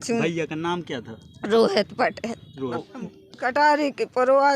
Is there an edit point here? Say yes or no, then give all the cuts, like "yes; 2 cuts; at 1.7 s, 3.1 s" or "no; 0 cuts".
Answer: yes; 1 cut; at 2.9 s